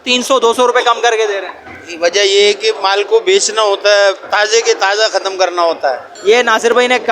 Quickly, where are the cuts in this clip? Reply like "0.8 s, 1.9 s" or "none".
6.1 s